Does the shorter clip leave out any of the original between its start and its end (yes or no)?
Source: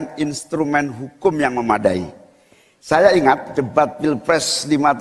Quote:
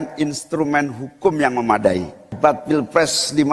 yes